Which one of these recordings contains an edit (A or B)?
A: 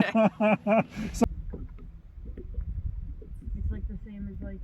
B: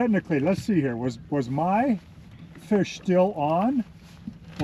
A